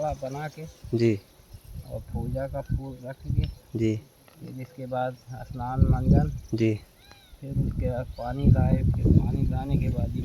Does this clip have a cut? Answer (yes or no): no